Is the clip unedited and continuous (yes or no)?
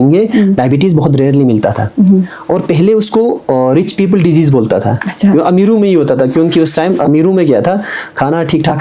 yes